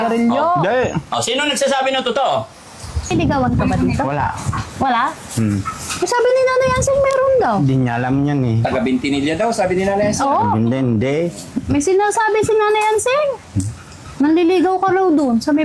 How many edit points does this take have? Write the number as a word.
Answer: one